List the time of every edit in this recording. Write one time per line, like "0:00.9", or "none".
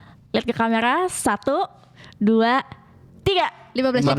none